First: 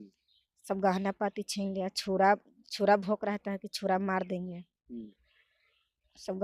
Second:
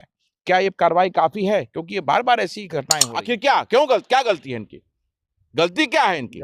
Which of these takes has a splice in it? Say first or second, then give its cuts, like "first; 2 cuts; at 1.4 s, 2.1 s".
second; 1 cut; at 3.0 s